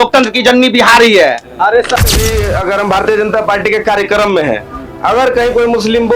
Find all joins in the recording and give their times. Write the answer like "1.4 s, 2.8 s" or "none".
2.0 s